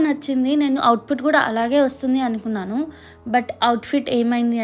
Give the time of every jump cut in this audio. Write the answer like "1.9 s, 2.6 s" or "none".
none